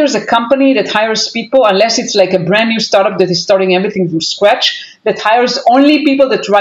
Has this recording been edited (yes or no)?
no